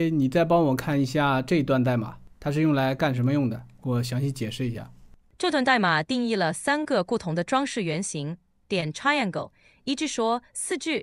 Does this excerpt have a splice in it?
no; 0 cuts

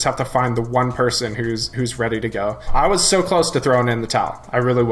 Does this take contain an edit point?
yes; 1 cut; at 2.7 s

